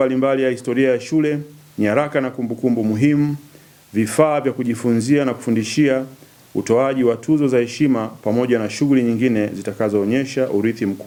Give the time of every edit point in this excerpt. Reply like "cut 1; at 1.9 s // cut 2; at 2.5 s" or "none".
none